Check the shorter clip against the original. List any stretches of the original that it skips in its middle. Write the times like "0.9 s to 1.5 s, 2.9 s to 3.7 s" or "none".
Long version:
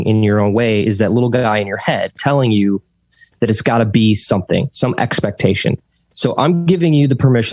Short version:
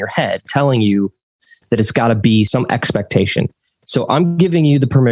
4.2 s to 4.8 s